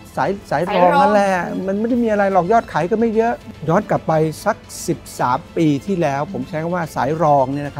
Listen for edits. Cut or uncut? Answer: uncut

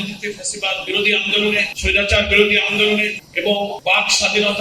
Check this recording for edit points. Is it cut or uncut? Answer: cut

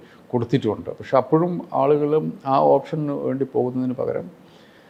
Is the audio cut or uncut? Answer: uncut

